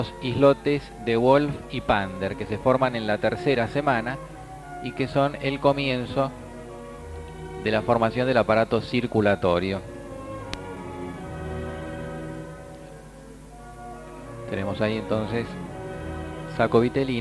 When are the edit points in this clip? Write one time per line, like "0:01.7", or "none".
0:12.0